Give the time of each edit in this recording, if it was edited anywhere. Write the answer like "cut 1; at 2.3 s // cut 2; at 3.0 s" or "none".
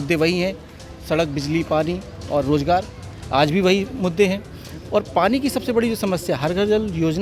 none